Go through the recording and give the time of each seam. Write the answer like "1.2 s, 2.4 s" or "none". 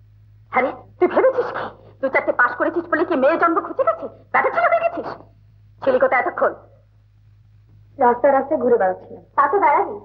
none